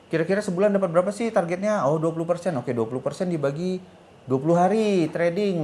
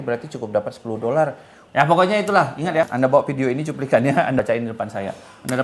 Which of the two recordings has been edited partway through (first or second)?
second